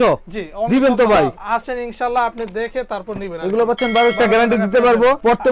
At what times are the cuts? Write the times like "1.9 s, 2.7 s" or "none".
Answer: 1.4 s, 4.1 s